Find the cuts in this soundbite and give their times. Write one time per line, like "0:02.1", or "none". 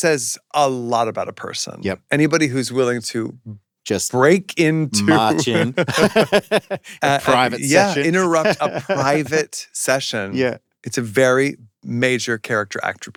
none